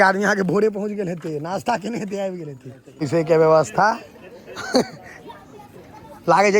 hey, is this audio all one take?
no; 1 cut; at 2.8 s

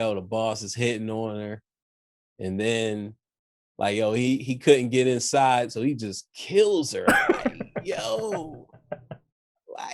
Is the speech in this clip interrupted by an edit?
no; 0 cuts

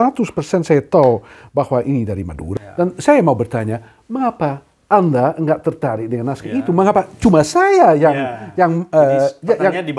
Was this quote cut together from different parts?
yes; 1 cut; at 2.4 s

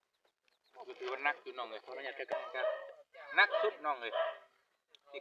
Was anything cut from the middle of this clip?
yes; 1 cut; at 2.3 s

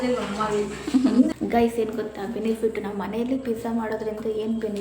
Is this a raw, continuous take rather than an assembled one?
no; 1 cut; at 1.1 s

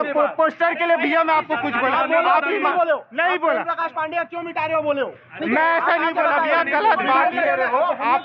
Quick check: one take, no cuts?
yes; 0 cuts

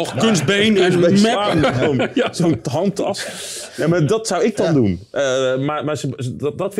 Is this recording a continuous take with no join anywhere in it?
yes; 0 cuts

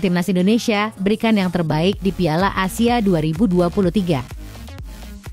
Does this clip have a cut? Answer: no; 0 cuts

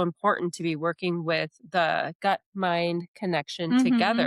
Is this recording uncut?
yes; 0 cuts

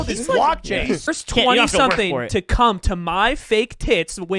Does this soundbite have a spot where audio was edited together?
yes; 1 cut; at 1.1 s

